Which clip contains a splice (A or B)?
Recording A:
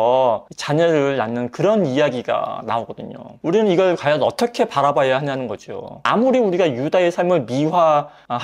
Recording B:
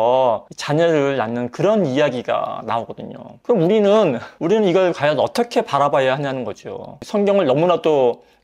A